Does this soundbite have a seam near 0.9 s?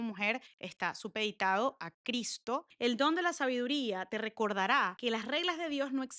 no; 1 cut; at 2.7 s

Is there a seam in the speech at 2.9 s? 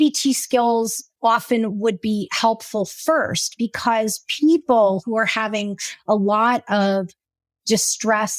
no; 1 cut; at 1.0 s

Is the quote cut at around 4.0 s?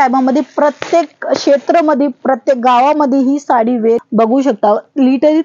yes; 1 cut; at 4.0 s

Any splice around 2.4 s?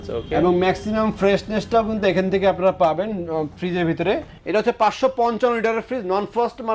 no; 1 cut; at 4.3 s

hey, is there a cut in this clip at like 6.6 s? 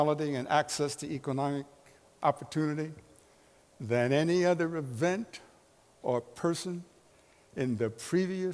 yes; 1 cut; at 6.6 s

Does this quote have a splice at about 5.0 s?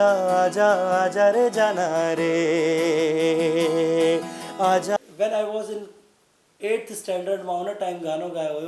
yes; 1 cut; at 5.0 s

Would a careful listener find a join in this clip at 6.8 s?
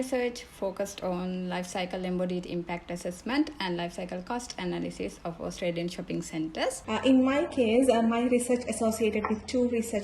yes; 1 cut; at 6.8 s

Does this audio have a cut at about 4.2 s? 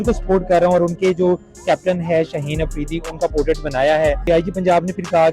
yes; 1 cut; at 4.2 s

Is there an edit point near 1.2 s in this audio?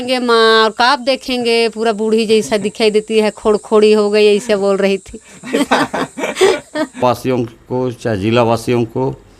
no; 1 cut; at 7.0 s

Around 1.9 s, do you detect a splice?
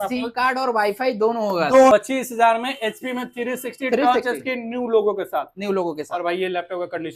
yes; 1 cut; at 1.9 s

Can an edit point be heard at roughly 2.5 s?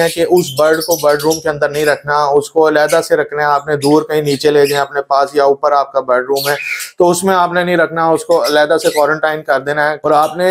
no; 0 cuts

